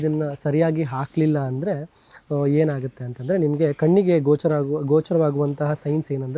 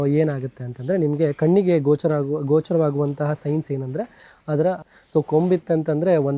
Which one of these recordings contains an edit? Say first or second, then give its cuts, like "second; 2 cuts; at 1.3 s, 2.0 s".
second; 1 cut; at 4.9 s